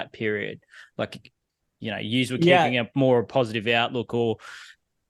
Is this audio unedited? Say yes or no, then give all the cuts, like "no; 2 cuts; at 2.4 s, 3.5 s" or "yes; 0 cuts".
yes; 0 cuts